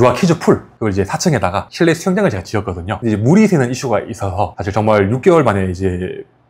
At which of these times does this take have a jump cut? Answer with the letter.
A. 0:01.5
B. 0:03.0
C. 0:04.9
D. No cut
B